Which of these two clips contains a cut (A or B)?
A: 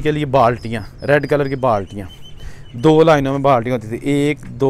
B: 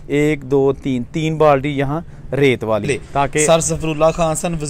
B